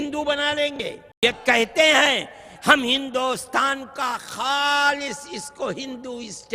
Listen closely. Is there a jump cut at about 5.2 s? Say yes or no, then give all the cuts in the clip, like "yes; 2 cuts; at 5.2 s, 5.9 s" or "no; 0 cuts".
no; 1 cut; at 1.0 s